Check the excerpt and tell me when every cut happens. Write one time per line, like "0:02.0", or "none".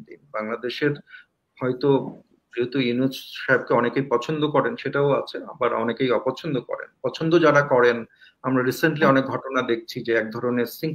none